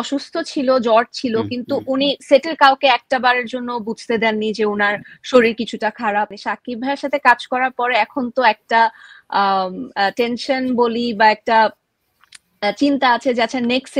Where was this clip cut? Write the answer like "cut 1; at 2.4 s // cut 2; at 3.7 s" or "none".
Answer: cut 1; at 6.3 s

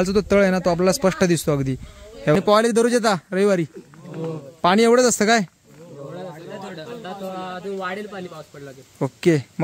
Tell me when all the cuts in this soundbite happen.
cut 1; at 2.3 s

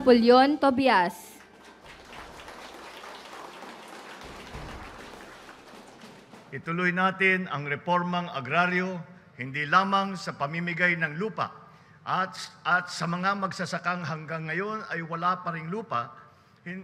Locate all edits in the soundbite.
cut 1; at 6.3 s

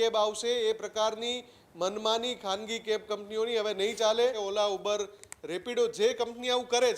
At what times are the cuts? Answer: cut 1; at 4.4 s

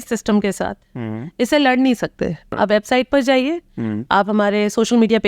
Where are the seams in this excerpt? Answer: cut 1; at 2.5 s

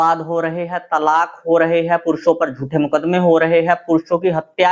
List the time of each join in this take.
none

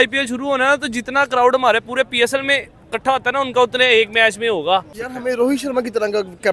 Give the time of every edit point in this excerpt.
cut 1; at 5.1 s

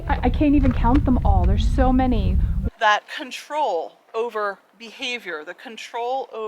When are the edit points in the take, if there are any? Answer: cut 1; at 2.5 s

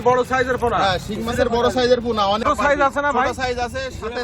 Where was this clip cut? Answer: cut 1; at 2.4 s

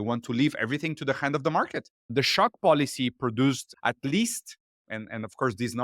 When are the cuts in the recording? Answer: cut 1; at 2.1 s

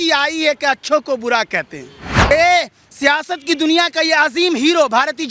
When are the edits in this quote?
cut 1; at 2.3 s

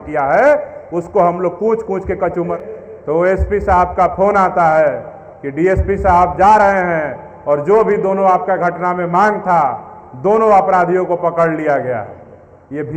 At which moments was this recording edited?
cut 1; at 2.5 s

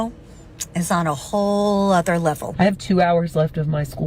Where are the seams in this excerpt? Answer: cut 1; at 2.4 s

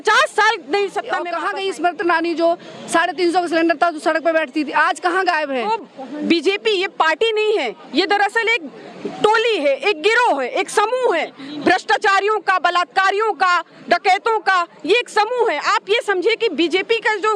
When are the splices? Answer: cut 1; at 1.3 s // cut 2; at 5.7 s

